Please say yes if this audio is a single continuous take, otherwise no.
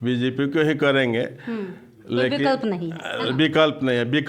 yes